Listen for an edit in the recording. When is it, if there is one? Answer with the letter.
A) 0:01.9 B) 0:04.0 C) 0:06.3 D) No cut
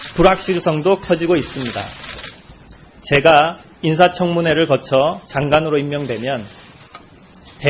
C